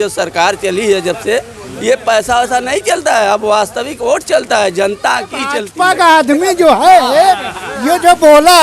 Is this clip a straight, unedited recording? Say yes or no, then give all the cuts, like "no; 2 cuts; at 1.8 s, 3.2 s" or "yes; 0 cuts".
no; 1 cut; at 5.7 s